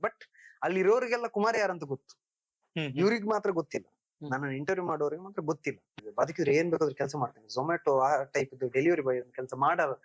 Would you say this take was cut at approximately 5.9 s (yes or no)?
yes